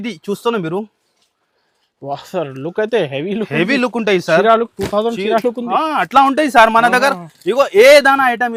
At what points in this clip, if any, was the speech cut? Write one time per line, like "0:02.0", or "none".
none